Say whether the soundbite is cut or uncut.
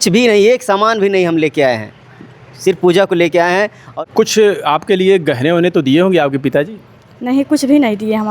cut